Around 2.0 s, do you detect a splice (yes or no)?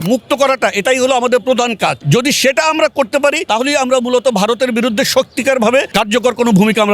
yes